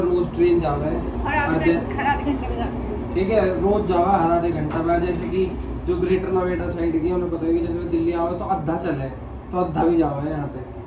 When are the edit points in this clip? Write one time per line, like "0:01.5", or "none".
none